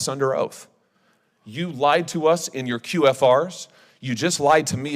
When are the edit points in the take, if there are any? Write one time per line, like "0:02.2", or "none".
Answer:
none